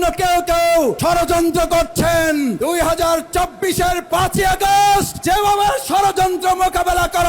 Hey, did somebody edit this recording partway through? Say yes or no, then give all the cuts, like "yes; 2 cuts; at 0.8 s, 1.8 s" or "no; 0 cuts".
yes; 3 cuts; at 1.0 s, 2.6 s, 5.1 s